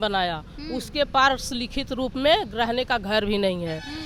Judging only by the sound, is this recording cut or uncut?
uncut